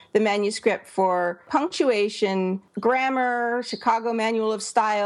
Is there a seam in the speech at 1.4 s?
yes; 2 cuts; at 1.4 s, 2.7 s

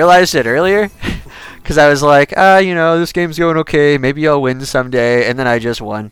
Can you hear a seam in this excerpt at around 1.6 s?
no; 0 cuts

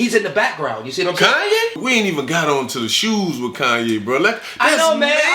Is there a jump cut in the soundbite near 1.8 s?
yes; 1 cut; at 1.8 s

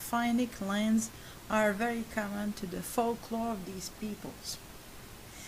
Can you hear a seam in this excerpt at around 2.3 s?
yes; 1 cut; at 2.3 s

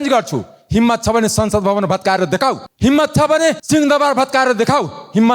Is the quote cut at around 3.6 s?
yes; 2 cuts; at 2.7 s, 3.6 s

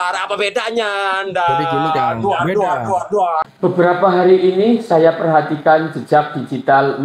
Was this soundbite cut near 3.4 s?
yes; 1 cut; at 3.4 s

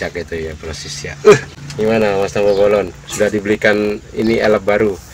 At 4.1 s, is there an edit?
no; 1 cut; at 1.6 s

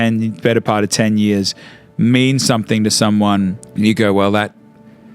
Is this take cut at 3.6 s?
yes; 1 cut; at 3.6 s

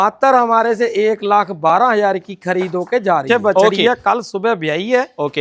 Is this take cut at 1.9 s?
no; 1 cut; at 3.8 s

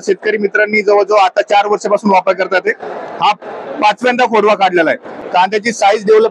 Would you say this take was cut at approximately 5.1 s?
yes; 1 cut; at 5.1 s

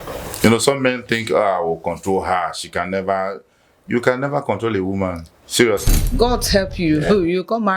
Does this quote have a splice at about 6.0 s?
yes; 1 cut; at 6.0 s

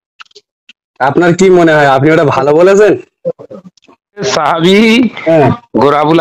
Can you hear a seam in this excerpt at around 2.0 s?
no; 1 cut; at 4.3 s

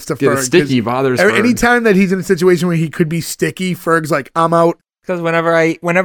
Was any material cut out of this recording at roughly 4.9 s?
yes; 1 cut; at 4.9 s

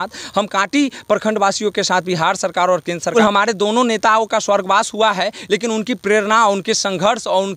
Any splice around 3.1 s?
yes; 1 cut; at 3.1 s

